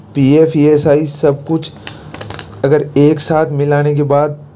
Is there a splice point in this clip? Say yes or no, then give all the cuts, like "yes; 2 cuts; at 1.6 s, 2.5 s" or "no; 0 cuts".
no; 0 cuts